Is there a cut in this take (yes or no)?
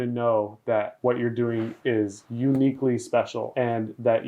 yes